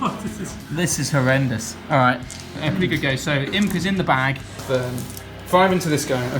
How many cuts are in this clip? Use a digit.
2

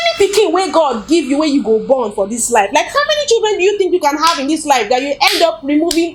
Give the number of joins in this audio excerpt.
0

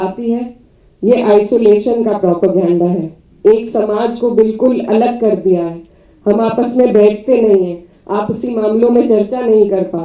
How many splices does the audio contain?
0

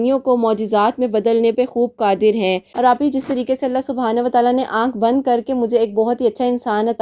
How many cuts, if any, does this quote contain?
1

